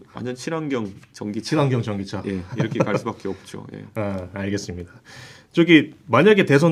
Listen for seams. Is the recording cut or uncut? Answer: uncut